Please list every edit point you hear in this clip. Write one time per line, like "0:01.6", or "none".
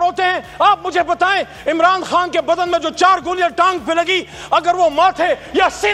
none